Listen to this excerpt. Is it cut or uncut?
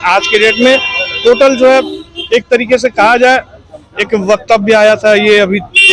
uncut